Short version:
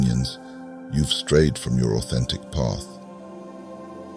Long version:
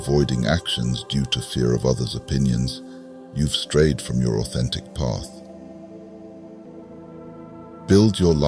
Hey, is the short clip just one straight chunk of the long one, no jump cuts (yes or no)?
yes